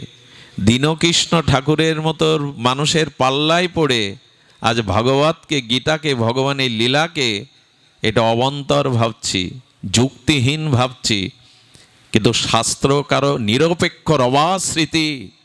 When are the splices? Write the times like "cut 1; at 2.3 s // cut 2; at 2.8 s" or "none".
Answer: none